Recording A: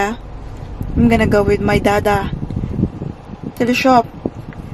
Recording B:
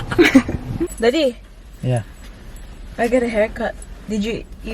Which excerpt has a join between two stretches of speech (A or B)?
B